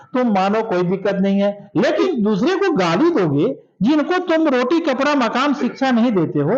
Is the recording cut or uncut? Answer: cut